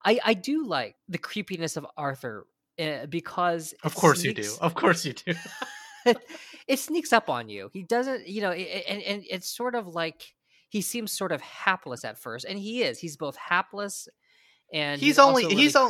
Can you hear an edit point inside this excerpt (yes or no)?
yes